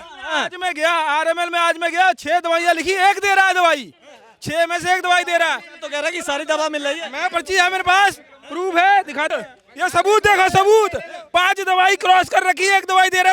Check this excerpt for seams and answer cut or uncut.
cut